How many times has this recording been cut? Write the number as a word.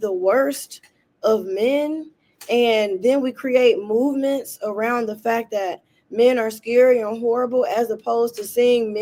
zero